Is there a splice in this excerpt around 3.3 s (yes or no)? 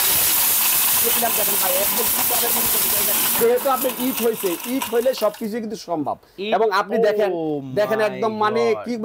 yes